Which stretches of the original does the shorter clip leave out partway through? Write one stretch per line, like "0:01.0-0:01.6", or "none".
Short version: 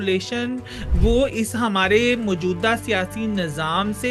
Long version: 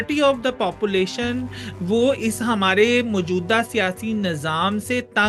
none